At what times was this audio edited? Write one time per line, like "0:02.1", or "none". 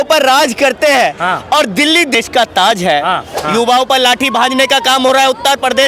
0:02.2
0:03.4